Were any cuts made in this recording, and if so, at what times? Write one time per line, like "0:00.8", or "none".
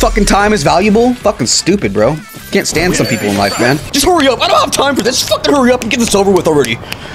0:03.9